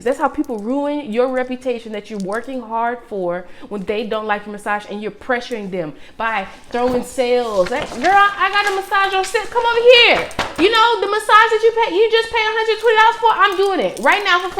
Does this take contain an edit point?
no; 0 cuts

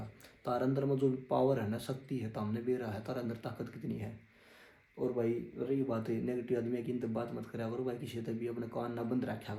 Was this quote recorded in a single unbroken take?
yes; 0 cuts

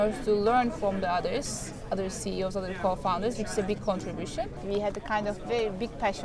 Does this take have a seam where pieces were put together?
yes; 1 cut; at 4.6 s

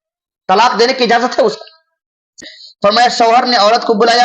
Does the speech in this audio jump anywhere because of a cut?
yes; 1 cut; at 2.4 s

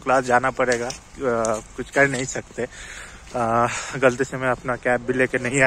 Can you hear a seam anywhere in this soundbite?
no; 0 cuts

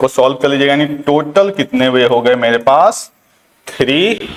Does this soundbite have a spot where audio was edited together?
no; 0 cuts

